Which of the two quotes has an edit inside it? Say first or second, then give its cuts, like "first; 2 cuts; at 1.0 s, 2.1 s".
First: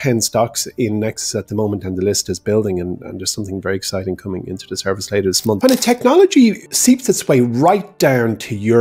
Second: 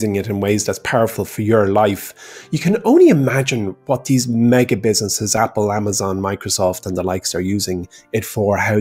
first; 2 cuts; at 5.6 s, 6.7 s